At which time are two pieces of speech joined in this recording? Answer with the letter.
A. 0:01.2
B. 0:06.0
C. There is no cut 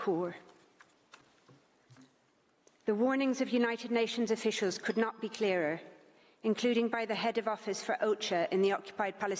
C